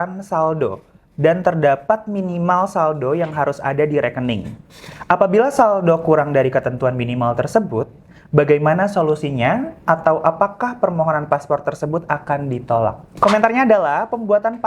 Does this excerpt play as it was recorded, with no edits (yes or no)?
no